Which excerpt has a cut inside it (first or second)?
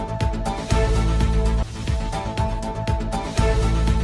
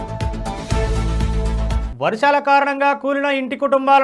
second